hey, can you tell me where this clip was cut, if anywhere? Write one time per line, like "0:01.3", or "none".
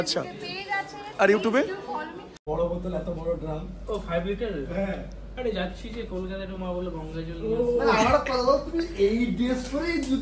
0:02.3